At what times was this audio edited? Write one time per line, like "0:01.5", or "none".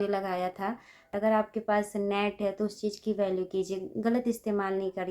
0:01.1